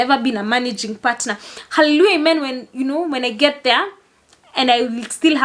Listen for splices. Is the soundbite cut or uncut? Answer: uncut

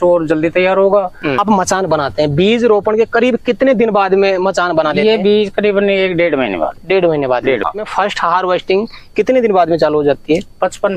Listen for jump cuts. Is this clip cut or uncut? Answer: cut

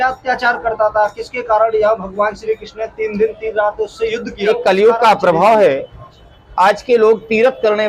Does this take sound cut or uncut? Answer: cut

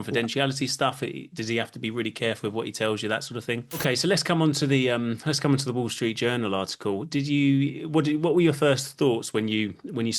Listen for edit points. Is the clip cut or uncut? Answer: cut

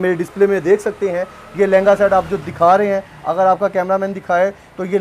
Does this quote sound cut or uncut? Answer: uncut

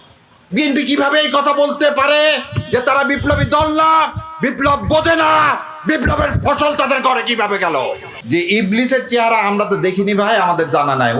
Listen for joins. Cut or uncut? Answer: cut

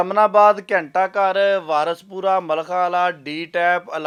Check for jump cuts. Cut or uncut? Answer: uncut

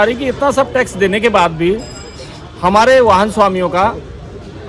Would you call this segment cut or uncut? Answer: uncut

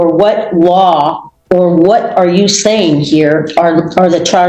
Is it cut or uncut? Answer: uncut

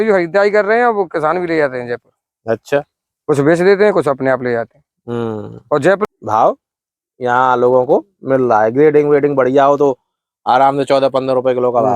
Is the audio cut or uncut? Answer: cut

